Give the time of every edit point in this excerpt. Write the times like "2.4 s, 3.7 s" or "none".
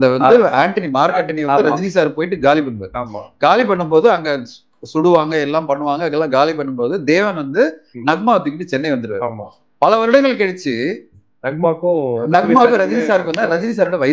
none